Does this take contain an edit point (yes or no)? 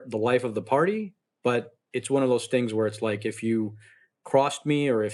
no